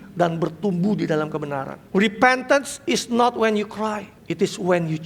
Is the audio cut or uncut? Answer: cut